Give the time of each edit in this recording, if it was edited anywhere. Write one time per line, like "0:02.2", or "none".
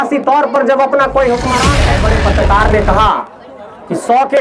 0:01.8